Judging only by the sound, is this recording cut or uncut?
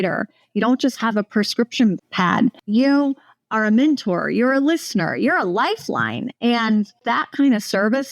cut